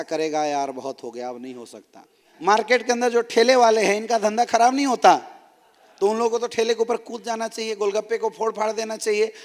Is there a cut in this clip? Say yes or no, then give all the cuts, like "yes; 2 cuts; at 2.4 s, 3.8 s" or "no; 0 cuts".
yes; 1 cut; at 2.3 s